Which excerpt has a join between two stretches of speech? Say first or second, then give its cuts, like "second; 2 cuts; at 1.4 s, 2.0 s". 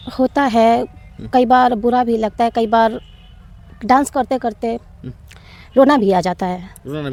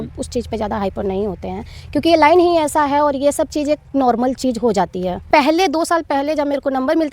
second; 1 cut; at 5.3 s